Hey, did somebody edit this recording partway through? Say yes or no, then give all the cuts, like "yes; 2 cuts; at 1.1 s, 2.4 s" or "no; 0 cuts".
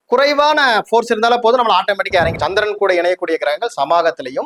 yes; 1 cut; at 2.3 s